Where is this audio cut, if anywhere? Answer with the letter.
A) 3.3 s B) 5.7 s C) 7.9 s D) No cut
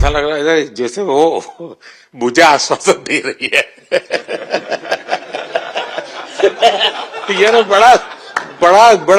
D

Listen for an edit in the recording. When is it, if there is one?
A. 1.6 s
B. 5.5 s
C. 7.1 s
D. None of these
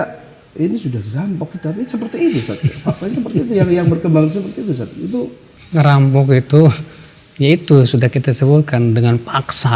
B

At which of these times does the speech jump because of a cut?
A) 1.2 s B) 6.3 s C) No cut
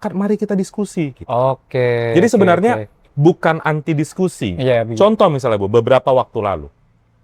C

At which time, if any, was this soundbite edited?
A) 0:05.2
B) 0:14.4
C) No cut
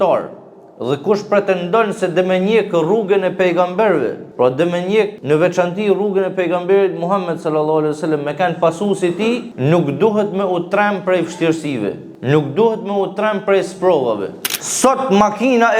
B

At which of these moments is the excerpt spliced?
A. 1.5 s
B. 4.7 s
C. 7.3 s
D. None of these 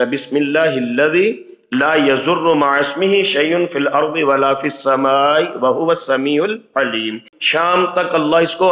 C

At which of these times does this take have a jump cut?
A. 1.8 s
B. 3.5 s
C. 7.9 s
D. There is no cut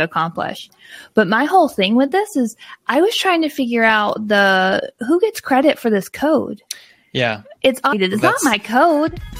C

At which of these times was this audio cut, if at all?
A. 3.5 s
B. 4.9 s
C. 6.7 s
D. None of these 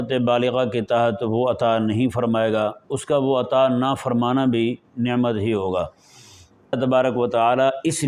C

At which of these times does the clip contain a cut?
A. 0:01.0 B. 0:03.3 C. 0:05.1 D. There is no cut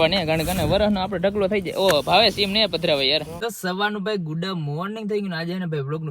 B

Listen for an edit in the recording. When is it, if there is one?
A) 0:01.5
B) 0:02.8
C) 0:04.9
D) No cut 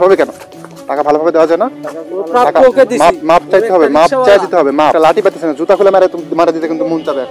C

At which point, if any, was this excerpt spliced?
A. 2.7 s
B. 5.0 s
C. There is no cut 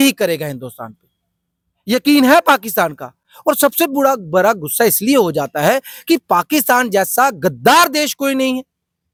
C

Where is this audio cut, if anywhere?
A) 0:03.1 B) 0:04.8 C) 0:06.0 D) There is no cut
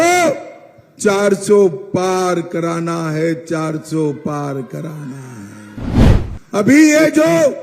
C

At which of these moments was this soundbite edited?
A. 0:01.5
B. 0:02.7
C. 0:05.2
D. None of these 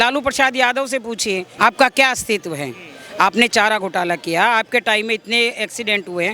A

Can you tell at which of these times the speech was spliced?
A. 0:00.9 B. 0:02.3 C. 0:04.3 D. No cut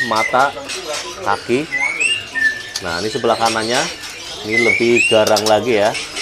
D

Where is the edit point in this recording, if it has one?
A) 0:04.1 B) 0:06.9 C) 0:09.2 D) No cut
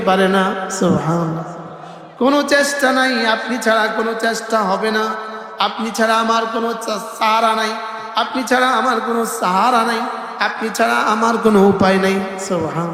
D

